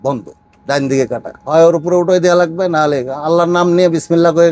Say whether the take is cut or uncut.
cut